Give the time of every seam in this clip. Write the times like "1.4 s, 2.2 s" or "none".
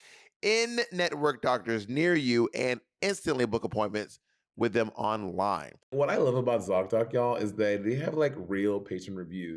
5.9 s